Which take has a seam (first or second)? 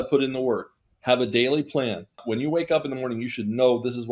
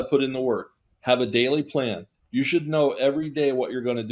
first